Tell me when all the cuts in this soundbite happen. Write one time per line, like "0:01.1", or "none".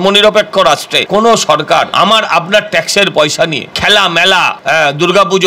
0:00.9
0:01.9
0:03.7
0:04.6